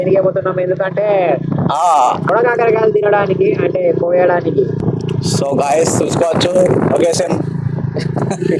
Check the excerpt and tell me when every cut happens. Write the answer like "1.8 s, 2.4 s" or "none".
2.3 s, 4.8 s